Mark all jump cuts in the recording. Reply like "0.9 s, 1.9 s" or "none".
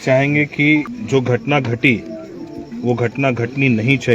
1.0 s